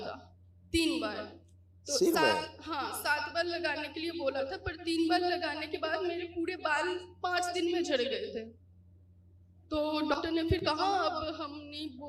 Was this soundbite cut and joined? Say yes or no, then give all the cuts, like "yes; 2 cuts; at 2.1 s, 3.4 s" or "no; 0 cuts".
yes; 1 cut; at 10.6 s